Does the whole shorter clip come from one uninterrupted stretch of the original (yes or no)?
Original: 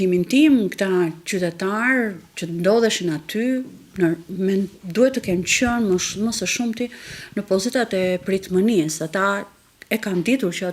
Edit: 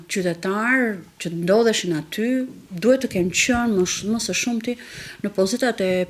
no